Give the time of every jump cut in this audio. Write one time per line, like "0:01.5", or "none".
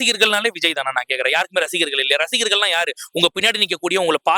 none